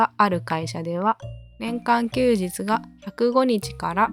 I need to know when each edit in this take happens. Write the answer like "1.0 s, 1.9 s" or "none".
none